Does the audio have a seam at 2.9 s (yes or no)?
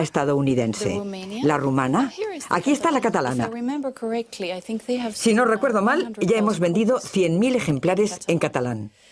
no